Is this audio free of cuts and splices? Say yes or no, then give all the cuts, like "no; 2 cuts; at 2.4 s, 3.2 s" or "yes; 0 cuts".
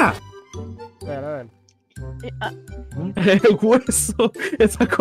yes; 0 cuts